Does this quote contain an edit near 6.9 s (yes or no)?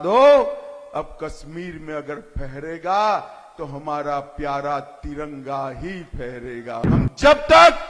yes